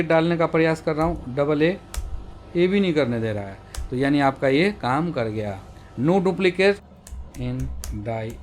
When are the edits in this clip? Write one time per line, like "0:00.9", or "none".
0:06.8

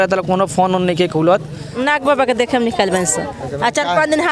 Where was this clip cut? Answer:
0:01.8

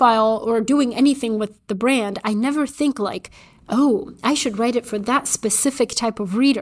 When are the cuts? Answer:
none

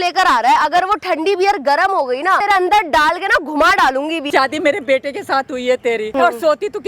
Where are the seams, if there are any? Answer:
0:02.4
0:04.2
0:06.1

